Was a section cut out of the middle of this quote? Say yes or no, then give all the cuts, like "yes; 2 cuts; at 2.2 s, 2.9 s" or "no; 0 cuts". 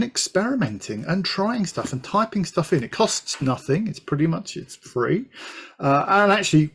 no; 0 cuts